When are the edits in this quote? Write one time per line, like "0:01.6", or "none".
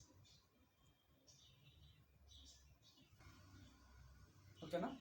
0:03.2